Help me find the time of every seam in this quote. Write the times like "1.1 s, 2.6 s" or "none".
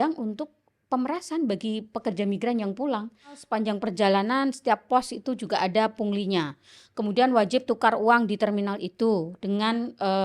3.5 s